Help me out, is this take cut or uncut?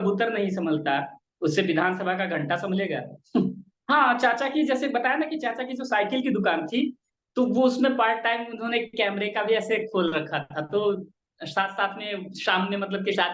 cut